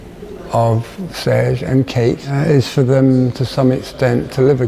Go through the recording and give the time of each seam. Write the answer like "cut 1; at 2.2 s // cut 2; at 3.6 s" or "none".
cut 1; at 2.3 s